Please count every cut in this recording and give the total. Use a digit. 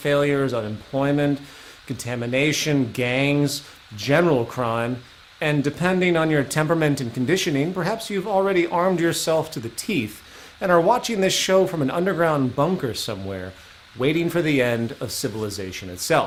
0